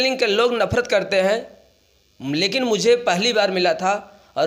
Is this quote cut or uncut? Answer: uncut